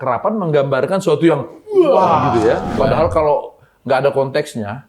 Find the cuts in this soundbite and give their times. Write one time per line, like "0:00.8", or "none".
0:02.8